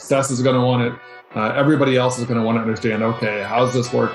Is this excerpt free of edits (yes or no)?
yes